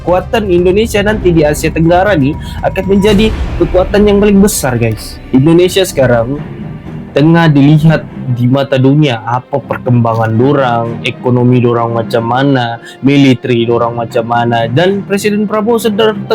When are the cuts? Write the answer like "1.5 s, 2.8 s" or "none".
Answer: 5.1 s